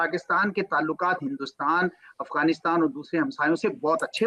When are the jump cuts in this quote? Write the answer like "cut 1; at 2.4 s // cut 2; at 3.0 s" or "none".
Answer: none